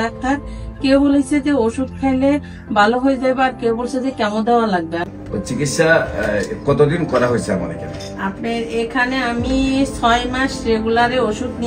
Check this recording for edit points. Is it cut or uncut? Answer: cut